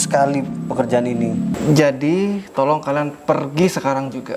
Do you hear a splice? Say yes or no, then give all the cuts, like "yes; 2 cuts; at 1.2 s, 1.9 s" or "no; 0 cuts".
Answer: yes; 1 cut; at 1.5 s